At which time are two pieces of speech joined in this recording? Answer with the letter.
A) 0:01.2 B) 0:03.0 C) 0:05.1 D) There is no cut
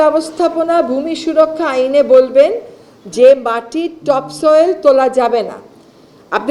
D